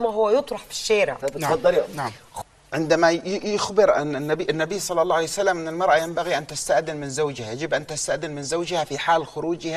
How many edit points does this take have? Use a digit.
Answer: 1